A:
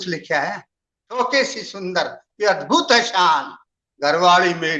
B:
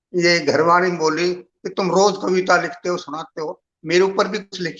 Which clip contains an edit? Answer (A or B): A